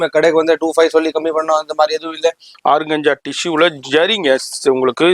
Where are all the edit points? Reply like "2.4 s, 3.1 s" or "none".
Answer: 2.5 s